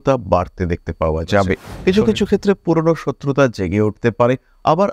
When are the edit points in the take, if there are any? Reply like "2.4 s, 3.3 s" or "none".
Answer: 1.7 s